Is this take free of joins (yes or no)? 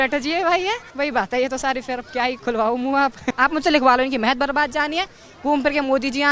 no